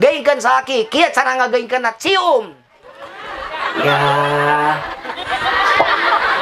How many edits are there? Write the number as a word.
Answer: zero